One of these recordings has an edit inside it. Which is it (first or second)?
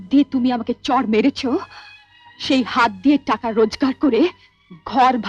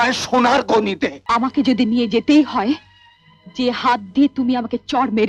second